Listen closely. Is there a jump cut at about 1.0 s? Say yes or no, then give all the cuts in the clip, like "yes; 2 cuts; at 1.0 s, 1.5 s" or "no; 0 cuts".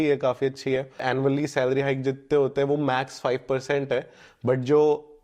yes; 1 cut; at 1.0 s